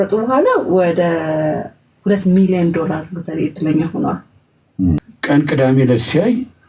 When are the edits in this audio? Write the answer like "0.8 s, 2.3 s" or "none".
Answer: 5.0 s